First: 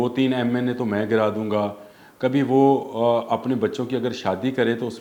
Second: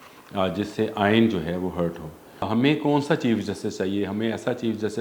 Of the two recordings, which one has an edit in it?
second; 1 cut; at 2.5 s

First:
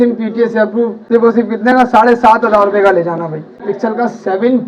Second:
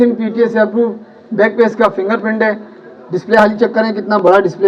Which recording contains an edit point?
first; 2 cuts; at 1.0 s, 3.7 s

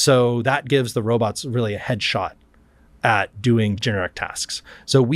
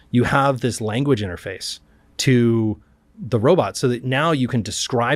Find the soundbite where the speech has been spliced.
first; 1 cut; at 3.8 s

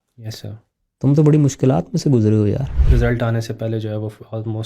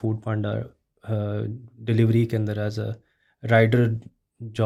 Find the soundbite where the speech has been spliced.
first; 1 cut; at 2.7 s

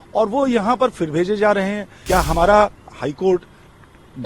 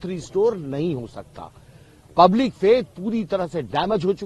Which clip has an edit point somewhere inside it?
first; 1 cut; at 1.9 s

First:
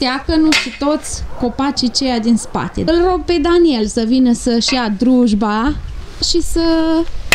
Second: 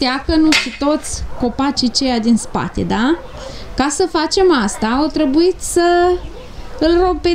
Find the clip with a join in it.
first; 2 cuts; at 2.8 s, 6.3 s

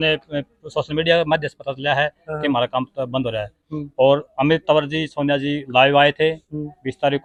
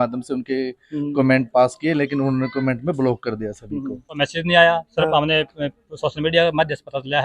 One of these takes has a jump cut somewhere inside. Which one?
second; 1 cut; at 4.2 s

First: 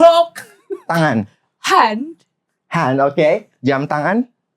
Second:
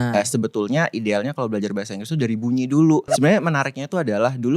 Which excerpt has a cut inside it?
second; 1 cut; at 3.1 s

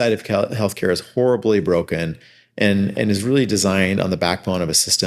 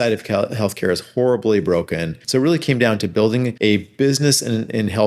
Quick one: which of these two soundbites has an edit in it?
second; 2 cuts; at 2.1 s, 3.5 s

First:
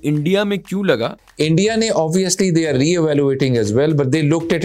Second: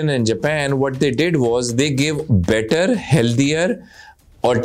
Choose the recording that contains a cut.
first; 1 cut; at 1.2 s

